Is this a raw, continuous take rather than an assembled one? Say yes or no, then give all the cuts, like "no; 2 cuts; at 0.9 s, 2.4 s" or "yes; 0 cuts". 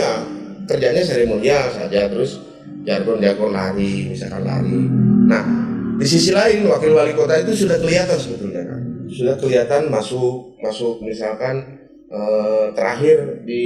yes; 0 cuts